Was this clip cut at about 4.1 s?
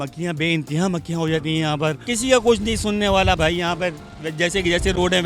no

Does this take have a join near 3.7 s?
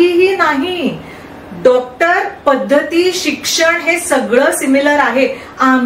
no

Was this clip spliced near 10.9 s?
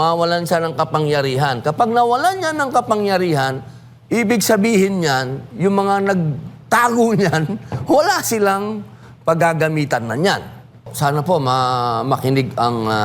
yes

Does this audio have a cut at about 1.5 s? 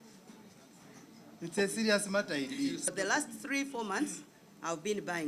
no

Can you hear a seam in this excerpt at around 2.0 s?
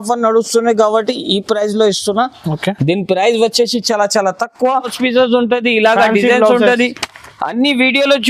no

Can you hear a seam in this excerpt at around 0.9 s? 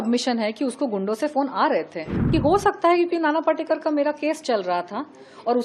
no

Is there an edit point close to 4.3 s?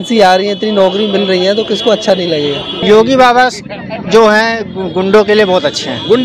no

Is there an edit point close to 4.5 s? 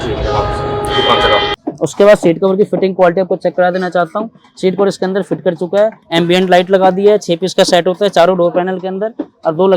no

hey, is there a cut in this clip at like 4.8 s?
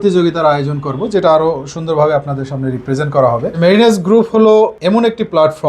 yes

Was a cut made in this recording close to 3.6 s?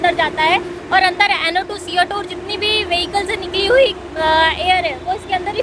no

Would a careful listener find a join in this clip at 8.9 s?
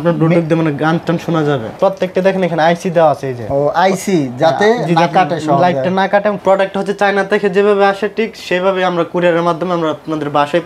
no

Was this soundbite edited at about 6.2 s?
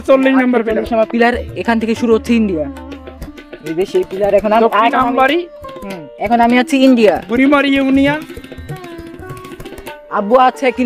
no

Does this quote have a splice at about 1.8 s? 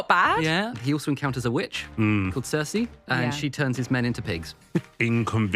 yes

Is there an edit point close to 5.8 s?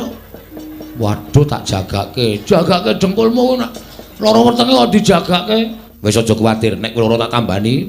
yes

